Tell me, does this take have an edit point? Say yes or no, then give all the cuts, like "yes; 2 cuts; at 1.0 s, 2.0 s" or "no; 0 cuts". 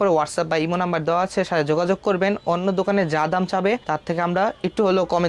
no; 0 cuts